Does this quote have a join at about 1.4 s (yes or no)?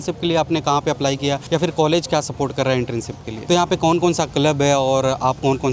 yes